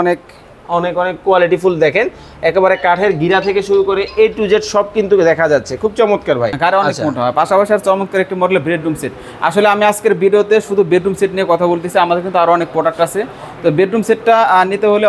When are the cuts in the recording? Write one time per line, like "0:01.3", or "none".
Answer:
0:06.5